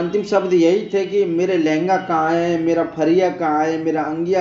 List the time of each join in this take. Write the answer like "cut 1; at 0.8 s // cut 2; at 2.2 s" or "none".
none